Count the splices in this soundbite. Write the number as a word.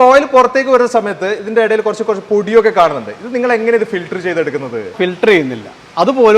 one